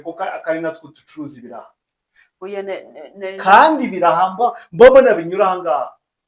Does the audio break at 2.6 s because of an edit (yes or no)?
no